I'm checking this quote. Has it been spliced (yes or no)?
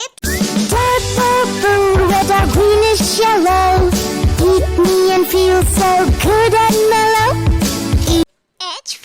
no